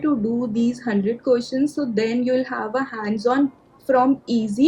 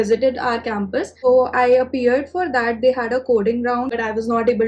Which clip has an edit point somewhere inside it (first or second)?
second